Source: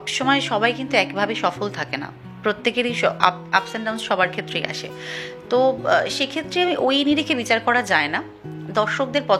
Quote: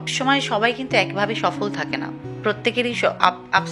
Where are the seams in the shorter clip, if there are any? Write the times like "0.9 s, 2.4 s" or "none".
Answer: none